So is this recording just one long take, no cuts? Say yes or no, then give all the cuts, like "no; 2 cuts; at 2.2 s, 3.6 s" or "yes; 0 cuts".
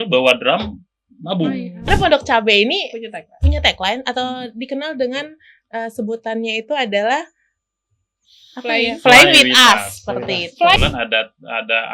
no; 2 cuts; at 1.9 s, 10.8 s